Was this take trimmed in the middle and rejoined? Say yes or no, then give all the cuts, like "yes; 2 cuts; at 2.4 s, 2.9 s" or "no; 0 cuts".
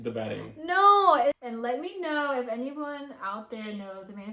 yes; 1 cut; at 1.4 s